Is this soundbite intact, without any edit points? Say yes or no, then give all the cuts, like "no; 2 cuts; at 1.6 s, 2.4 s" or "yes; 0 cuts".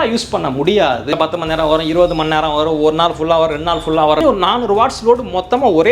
no; 2 cuts; at 1.1 s, 4.2 s